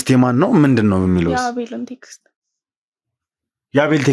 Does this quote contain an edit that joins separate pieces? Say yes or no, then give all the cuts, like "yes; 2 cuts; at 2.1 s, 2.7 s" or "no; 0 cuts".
no; 0 cuts